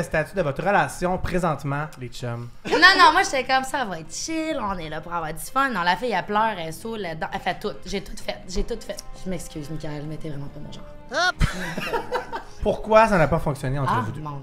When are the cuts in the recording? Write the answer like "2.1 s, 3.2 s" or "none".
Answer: 2.7 s, 9.1 s, 12.5 s